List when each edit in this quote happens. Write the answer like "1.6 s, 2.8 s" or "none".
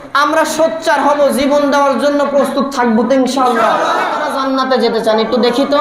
4.2 s